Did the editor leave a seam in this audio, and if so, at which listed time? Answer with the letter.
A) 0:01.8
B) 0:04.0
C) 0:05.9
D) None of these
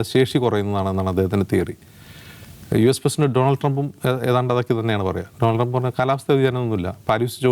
D